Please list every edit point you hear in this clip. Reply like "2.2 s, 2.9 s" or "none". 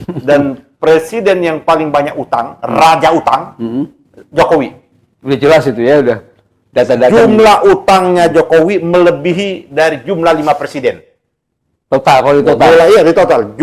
none